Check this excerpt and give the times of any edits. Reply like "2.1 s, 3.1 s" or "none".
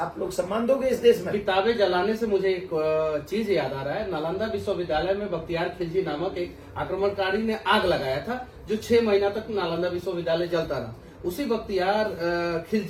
none